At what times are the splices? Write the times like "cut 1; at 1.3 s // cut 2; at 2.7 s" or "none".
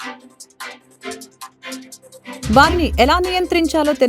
cut 1; at 1.5 s // cut 2; at 2.5 s